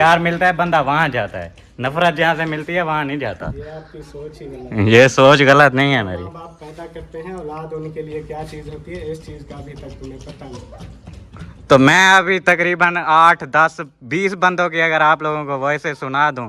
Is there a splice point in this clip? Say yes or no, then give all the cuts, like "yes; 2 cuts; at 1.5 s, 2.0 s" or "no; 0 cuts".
no; 0 cuts